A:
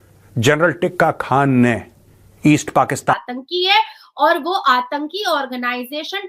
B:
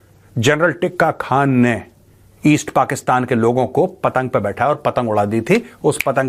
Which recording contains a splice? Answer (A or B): A